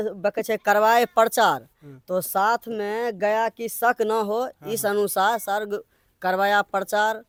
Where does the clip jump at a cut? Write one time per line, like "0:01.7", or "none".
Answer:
none